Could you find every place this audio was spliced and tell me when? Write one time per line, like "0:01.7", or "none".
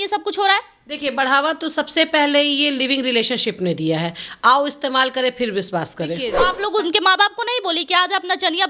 0:06.4